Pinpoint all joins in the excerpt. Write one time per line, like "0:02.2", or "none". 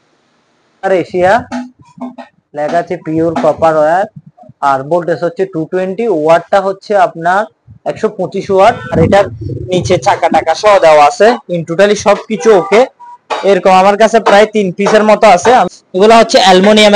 0:00.8
0:09.0
0:15.8